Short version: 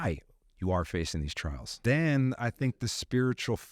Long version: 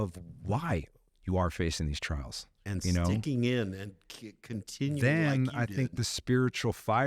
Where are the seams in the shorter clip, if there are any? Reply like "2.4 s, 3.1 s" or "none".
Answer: 1.8 s